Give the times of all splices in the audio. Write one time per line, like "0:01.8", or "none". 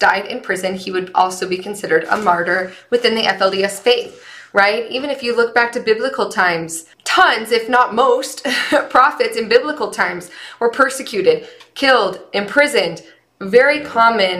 none